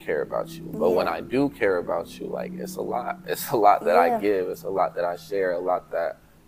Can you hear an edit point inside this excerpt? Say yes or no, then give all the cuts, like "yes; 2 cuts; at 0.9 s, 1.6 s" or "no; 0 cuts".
no; 0 cuts